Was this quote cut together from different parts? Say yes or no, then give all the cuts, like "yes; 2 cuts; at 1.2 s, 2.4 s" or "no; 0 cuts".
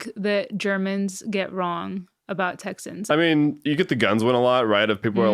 yes; 1 cut; at 3.1 s